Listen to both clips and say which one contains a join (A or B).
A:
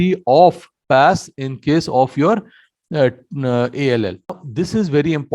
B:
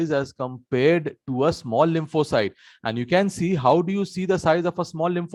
A